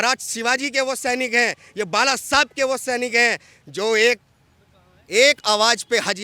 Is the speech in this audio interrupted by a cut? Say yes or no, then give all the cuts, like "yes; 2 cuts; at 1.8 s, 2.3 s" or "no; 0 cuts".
no; 0 cuts